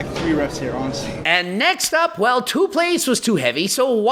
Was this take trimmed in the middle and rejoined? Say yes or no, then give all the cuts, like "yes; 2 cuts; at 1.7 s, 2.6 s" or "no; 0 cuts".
yes; 1 cut; at 1.2 s